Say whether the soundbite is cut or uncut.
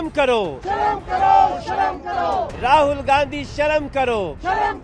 uncut